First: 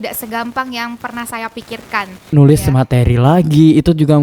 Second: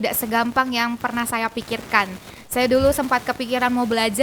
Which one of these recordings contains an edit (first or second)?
first